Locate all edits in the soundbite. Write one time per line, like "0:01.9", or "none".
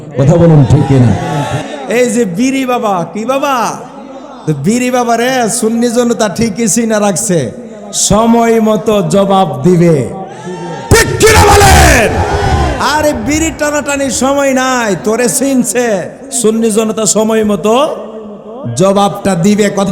0:01.6